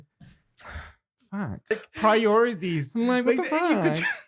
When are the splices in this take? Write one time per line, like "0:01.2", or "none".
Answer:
0:01.9